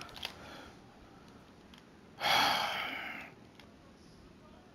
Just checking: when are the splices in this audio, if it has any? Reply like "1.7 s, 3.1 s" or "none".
3.6 s